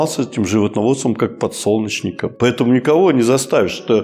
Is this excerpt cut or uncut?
cut